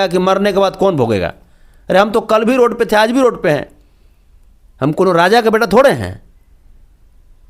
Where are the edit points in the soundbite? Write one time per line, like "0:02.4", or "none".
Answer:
none